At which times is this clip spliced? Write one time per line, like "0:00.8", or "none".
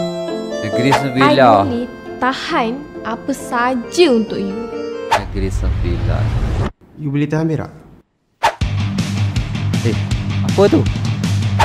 none